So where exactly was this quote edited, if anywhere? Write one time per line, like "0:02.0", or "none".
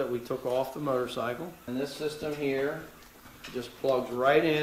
0:01.6